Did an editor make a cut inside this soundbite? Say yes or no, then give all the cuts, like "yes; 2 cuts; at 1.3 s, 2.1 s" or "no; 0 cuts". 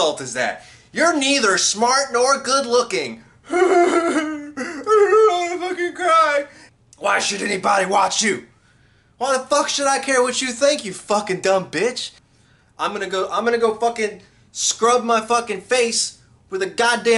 yes; 2 cuts; at 6.6 s, 12.2 s